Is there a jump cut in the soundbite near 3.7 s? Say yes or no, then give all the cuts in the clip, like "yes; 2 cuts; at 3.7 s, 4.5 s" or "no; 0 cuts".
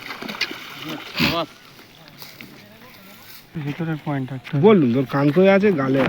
yes; 1 cut; at 3.7 s